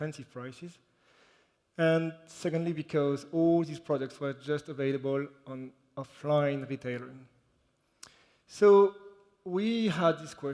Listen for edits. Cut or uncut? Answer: cut